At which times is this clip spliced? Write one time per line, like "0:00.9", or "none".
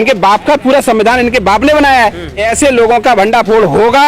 0:02.4